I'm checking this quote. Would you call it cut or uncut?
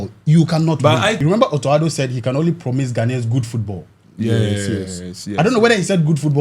cut